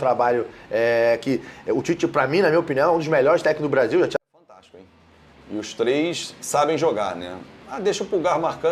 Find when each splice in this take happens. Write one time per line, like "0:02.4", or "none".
0:04.2